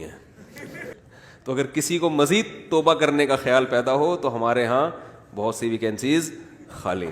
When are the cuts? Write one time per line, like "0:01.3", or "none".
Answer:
0:00.9